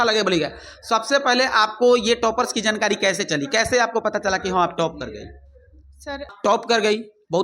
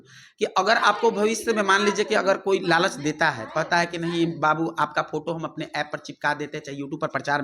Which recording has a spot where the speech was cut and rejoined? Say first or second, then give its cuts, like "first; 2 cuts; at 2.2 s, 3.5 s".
first; 1 cut; at 6.3 s